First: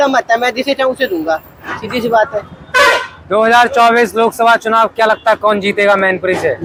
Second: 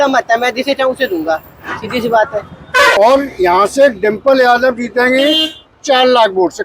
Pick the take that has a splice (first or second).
second